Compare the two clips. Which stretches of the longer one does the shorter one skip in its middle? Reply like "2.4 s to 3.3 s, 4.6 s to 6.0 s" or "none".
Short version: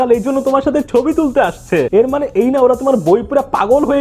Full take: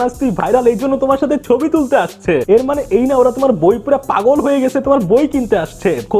none